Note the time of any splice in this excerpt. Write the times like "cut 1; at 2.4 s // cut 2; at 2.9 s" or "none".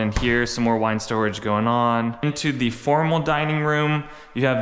none